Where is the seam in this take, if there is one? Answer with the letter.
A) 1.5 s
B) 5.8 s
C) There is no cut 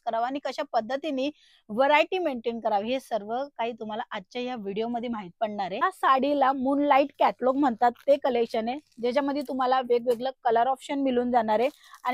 B